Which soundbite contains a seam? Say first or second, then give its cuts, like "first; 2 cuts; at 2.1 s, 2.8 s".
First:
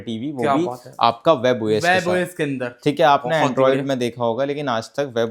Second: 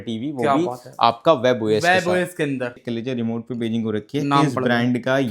second; 1 cut; at 2.7 s